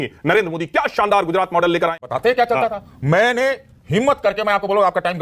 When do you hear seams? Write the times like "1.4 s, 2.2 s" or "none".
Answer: 2.0 s